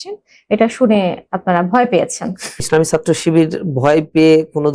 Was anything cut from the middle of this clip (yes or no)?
yes